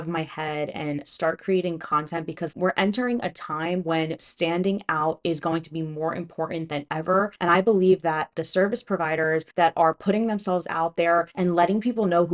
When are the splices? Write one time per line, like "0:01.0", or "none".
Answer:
0:02.5